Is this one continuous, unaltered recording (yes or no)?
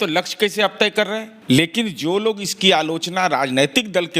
no